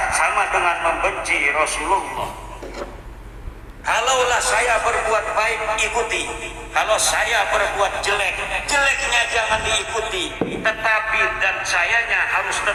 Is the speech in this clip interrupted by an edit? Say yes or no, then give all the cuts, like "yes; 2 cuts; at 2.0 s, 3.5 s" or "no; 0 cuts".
no; 0 cuts